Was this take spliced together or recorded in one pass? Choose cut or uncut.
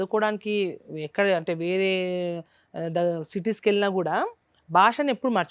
uncut